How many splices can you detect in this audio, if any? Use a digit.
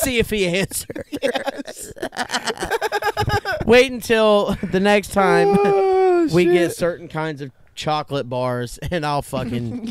1